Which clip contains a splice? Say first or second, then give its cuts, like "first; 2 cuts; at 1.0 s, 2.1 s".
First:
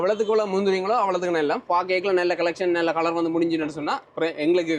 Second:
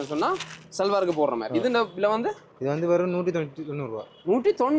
first; 1 cut; at 1.6 s